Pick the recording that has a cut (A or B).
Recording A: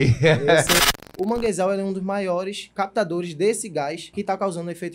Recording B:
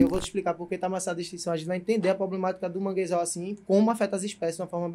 A